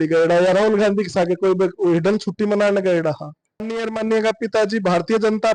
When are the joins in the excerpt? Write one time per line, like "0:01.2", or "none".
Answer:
0:03.7